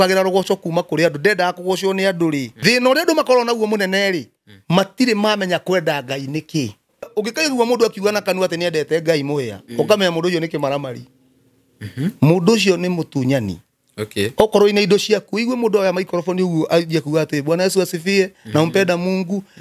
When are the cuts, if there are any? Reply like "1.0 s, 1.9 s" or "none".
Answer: 2.5 s, 7.1 s